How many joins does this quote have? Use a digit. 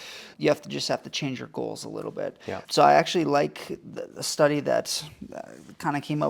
0